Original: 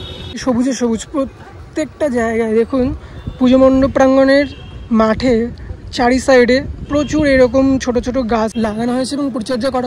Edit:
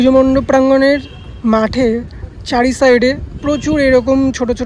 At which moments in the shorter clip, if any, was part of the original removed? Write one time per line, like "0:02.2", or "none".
none